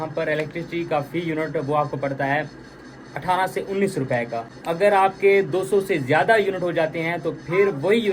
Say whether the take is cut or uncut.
uncut